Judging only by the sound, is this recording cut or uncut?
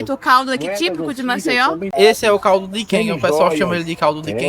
cut